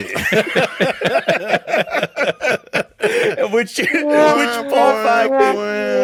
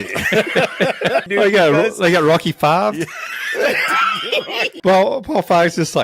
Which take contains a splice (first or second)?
second